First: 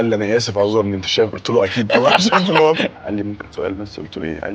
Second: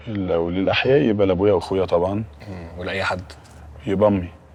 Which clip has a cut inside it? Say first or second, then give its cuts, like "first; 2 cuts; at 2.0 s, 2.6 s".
first; 1 cut; at 2.9 s